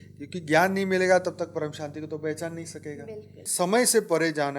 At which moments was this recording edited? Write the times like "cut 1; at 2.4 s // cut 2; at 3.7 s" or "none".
cut 1; at 3.4 s

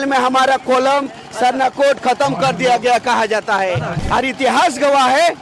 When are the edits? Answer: cut 1; at 4.0 s

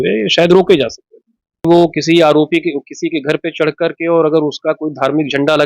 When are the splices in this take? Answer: cut 1; at 1.7 s

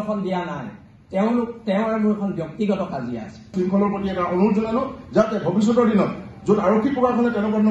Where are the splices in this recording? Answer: cut 1; at 3.5 s

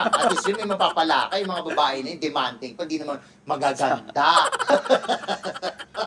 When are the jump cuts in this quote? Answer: none

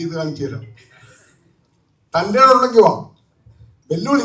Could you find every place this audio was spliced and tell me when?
none

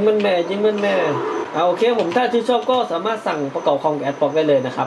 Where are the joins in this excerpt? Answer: cut 1; at 1.4 s

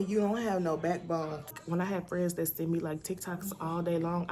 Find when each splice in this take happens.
cut 1; at 1.6 s

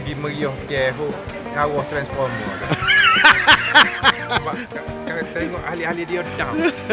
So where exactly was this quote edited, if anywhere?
none

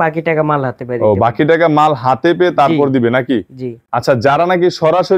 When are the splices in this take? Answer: none

